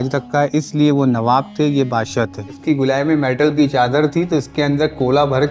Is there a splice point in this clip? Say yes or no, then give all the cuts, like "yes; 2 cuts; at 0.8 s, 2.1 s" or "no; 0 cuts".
yes; 1 cut; at 2.6 s